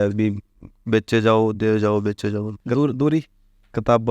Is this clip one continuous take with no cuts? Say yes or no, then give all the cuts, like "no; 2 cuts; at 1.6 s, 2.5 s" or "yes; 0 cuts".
no; 1 cut; at 2.5 s